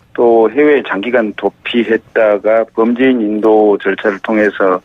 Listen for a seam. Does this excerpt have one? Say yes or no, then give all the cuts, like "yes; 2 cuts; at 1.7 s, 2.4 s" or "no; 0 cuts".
yes; 1 cut; at 2.7 s